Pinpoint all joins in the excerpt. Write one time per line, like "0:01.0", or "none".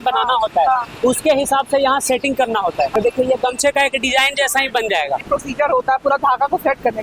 0:02.9
0:05.2